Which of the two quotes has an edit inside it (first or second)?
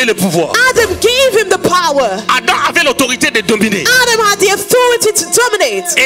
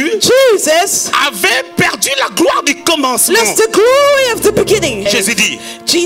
second